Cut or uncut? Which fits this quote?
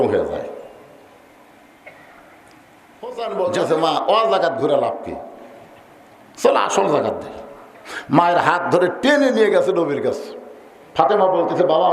cut